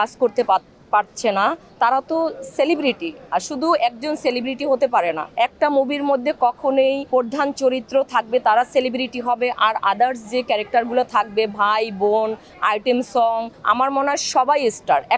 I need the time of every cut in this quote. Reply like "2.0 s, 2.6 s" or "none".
1.7 s, 5.2 s, 7.0 s, 13.5 s